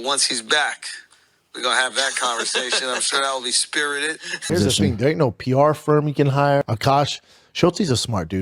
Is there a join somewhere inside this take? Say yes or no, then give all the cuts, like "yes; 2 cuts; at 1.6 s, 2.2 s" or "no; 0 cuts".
yes; 2 cuts; at 4.5 s, 6.7 s